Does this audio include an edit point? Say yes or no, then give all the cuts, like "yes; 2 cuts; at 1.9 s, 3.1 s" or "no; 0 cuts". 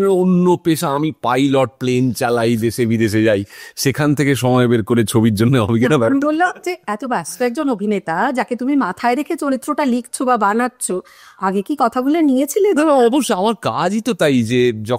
no; 0 cuts